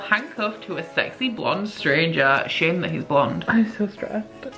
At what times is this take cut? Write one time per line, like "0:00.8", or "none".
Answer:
0:03.4